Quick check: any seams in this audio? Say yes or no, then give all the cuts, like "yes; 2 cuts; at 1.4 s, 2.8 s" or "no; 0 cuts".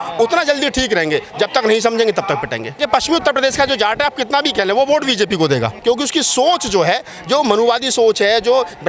yes; 2 cuts; at 2.8 s, 5.7 s